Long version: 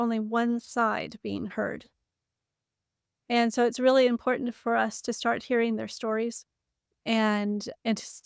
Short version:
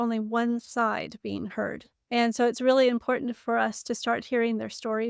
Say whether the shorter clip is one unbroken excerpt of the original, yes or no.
no